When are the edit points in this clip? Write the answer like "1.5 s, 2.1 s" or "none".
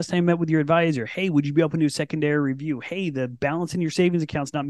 none